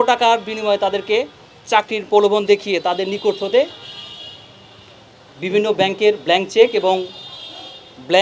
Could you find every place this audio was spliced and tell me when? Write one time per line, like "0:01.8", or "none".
none